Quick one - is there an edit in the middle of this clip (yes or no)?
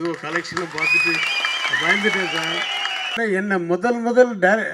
yes